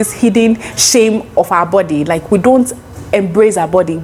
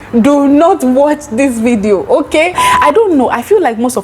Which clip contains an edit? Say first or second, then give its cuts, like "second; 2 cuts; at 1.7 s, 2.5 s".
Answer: second; 1 cut; at 2.7 s